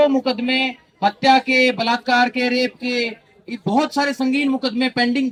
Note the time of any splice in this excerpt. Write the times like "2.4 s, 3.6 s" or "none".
none